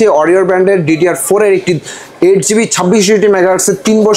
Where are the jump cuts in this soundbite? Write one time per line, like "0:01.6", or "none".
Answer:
none